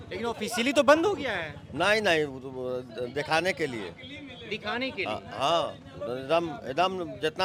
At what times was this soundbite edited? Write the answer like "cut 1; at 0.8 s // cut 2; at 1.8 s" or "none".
none